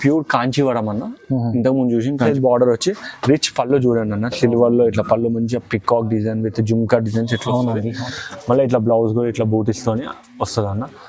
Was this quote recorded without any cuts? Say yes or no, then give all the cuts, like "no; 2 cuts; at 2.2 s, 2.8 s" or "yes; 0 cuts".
no; 1 cut; at 2.3 s